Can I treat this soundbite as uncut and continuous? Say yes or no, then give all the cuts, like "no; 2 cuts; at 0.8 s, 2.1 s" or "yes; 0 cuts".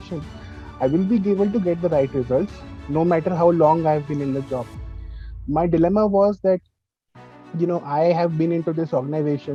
yes; 0 cuts